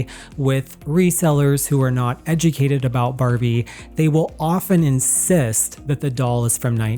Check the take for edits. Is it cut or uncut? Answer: uncut